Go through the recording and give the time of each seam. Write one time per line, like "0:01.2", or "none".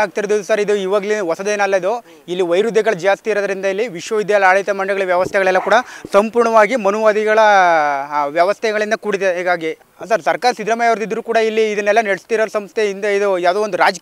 none